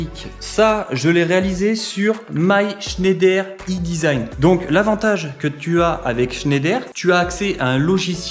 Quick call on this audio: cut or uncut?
uncut